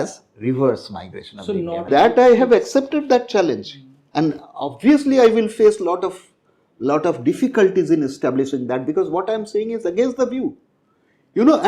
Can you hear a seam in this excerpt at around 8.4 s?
no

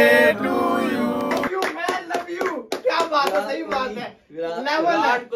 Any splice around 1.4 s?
yes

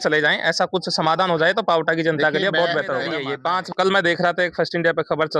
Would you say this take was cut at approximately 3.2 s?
yes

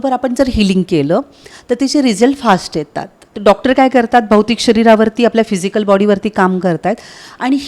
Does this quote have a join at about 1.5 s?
no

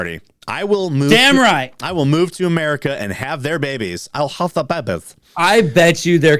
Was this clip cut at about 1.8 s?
no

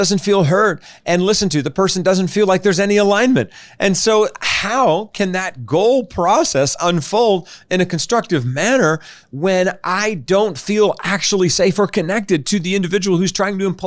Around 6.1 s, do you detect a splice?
no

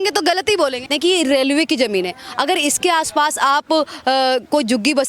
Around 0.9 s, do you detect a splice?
yes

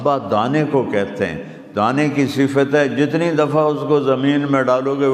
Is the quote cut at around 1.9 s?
no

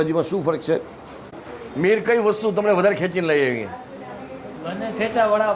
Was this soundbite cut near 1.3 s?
yes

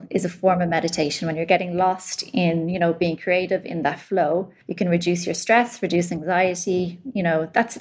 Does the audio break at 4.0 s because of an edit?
no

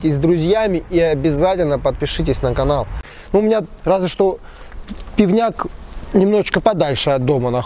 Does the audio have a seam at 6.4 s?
no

